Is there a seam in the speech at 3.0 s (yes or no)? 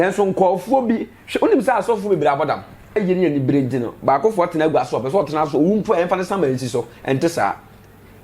yes